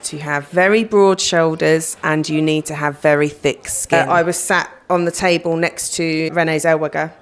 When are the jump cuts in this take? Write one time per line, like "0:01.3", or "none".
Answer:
0:03.9
0:06.3